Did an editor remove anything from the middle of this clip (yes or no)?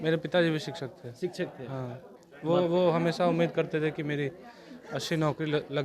yes